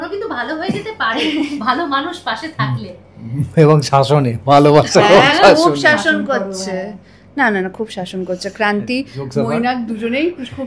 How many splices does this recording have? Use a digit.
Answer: 0